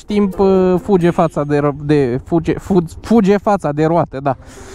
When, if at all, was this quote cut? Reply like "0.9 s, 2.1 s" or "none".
none